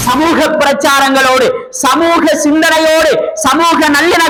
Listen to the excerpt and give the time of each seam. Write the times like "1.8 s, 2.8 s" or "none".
none